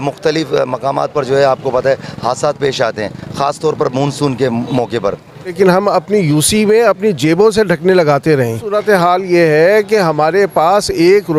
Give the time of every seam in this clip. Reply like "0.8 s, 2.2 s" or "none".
5.5 s, 8.8 s